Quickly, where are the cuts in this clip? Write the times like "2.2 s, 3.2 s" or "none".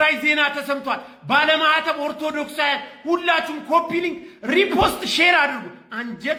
none